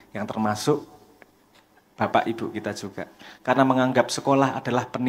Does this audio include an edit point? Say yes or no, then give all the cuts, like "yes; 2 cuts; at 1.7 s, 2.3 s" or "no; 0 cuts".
no; 0 cuts